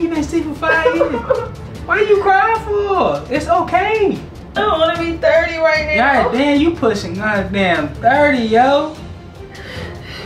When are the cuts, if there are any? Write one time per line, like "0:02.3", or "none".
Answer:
0:04.6